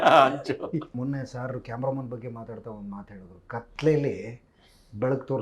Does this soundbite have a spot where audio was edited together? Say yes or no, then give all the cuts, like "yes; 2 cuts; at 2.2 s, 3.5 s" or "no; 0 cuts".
yes; 1 cut; at 0.9 s